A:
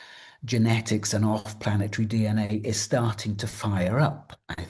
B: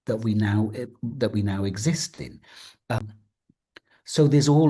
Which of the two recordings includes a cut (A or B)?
B